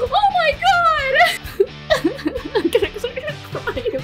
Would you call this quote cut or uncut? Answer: cut